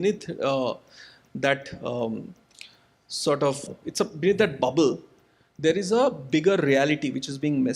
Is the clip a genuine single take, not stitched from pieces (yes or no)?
no